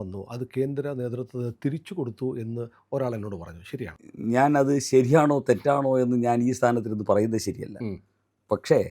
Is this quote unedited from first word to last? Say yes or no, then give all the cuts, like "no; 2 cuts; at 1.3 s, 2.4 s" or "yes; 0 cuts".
no; 1 cut; at 4.0 s